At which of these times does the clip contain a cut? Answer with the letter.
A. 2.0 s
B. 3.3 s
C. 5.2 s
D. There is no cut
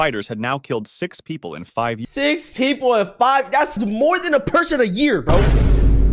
D